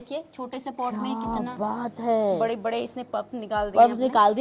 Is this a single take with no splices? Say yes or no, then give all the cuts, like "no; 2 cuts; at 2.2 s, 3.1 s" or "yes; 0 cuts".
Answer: yes; 0 cuts